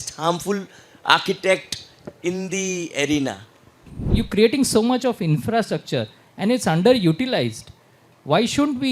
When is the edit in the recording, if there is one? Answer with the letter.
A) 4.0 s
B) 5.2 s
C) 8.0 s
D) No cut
A